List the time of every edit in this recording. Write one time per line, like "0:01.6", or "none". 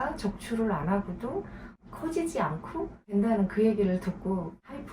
0:01.8